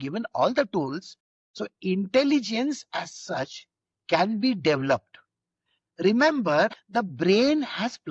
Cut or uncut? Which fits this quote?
cut